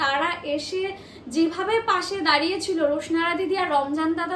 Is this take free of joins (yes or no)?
yes